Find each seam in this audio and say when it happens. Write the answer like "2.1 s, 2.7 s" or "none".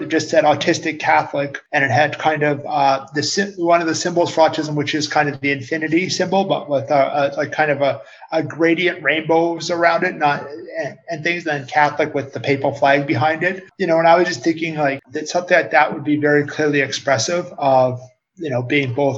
1.6 s, 13.6 s